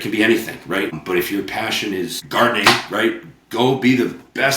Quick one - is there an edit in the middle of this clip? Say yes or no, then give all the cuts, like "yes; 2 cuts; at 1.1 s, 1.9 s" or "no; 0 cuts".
yes; 2 cuts; at 0.9 s, 2.2 s